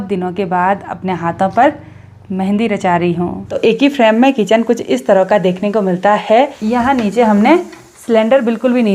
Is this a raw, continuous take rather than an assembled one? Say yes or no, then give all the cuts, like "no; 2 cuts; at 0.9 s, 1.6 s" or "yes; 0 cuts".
no; 2 cuts; at 3.4 s, 6.6 s